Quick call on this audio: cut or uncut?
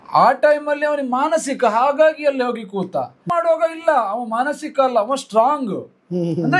cut